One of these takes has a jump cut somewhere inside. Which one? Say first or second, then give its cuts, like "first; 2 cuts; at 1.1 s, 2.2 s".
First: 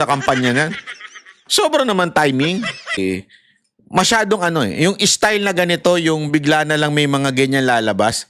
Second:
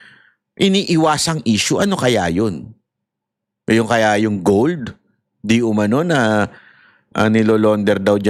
first; 1 cut; at 3.0 s